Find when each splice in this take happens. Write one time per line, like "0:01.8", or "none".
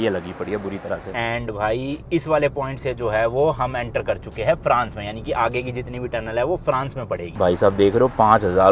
0:01.1
0:07.4